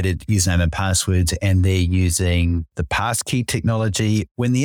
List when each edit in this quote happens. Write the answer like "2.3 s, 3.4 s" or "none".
none